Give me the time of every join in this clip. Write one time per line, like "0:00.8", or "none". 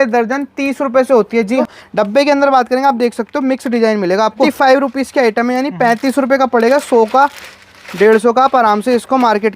0:01.6
0:04.5